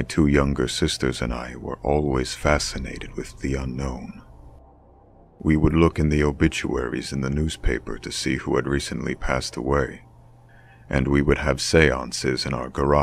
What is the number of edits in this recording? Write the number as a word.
one